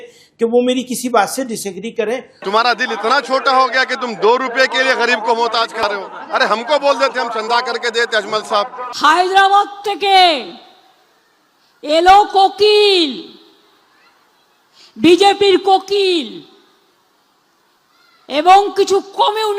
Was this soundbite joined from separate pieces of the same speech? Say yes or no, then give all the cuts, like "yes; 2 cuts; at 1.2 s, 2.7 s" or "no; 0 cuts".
yes; 2 cuts; at 2.4 s, 8.8 s